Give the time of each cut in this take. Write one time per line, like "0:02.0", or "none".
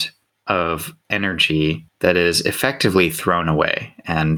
0:00.9
0:01.9

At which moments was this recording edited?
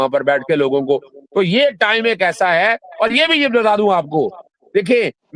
none

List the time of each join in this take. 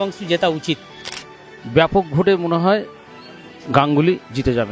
0:01.1

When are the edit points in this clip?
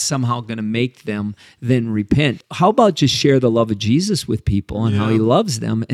0:02.4

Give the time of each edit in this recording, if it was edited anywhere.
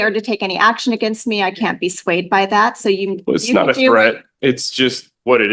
none

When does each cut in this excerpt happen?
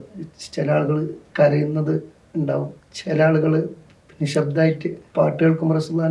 0:01.2
0:02.8
0:05.0

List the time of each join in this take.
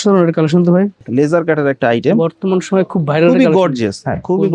0:01.0

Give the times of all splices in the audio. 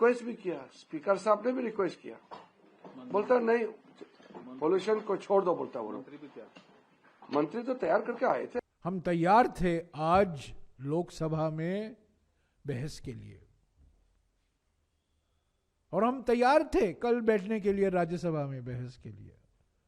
0:08.6

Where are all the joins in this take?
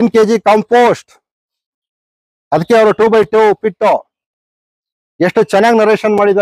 none

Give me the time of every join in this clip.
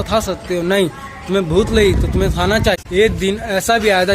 0:02.8

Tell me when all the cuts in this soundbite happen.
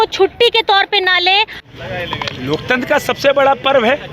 0:01.7

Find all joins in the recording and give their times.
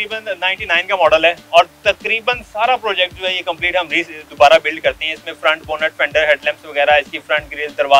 none

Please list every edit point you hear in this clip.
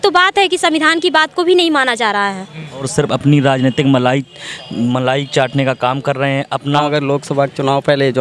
0:02.9
0:06.8

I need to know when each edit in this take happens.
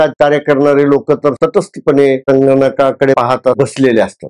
0:01.4
0:03.2

